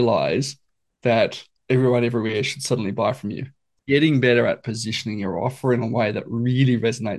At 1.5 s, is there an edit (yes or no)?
yes